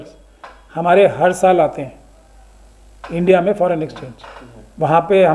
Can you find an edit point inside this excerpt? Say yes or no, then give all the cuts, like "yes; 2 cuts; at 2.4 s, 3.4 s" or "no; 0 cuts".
no; 0 cuts